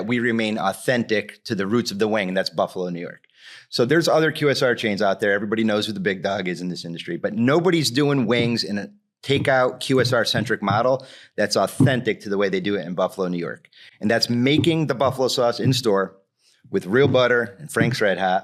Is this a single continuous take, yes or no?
yes